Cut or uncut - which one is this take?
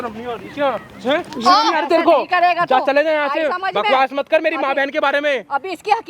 uncut